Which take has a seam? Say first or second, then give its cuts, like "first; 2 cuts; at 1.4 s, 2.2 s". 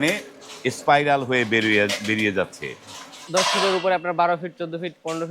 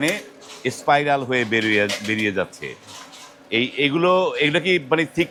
first; 1 cut; at 3.2 s